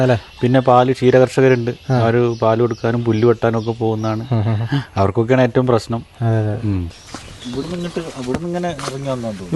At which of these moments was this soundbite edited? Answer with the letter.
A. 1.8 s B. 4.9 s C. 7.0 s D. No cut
C